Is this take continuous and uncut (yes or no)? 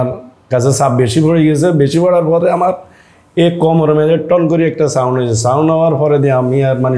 yes